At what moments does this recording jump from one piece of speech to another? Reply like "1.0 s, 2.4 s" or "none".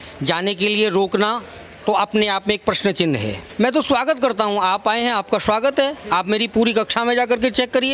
3.4 s